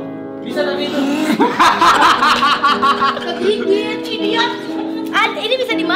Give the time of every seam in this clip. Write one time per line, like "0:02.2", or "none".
none